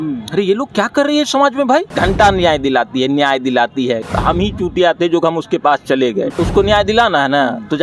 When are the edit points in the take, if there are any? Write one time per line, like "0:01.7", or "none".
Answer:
0:01.9
0:04.0
0:06.3